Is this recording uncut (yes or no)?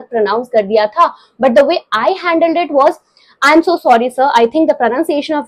yes